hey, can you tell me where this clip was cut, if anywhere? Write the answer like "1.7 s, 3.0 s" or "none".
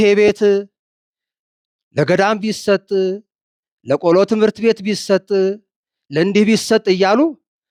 none